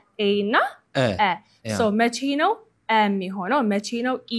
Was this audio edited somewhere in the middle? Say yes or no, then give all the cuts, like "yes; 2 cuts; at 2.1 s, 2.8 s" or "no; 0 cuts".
no; 0 cuts